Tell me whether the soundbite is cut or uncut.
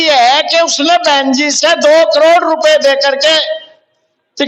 uncut